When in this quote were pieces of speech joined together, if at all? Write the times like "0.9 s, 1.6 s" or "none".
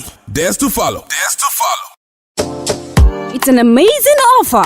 1.9 s